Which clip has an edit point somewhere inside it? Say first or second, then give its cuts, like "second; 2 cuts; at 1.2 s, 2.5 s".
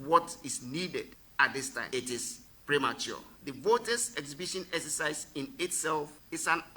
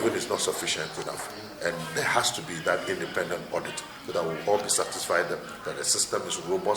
first; 1 cut; at 1.8 s